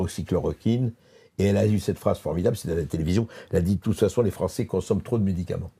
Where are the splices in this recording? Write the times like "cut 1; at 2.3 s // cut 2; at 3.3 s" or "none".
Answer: none